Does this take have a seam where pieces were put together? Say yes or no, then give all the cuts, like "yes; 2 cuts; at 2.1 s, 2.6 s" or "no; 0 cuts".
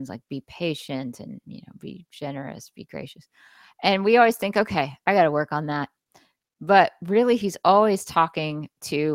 no; 0 cuts